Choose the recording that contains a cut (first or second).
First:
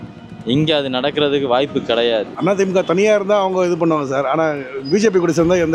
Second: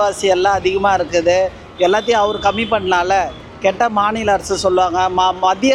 first